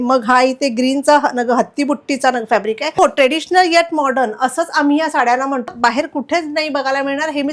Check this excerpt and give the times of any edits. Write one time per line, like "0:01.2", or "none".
0:03.0
0:05.7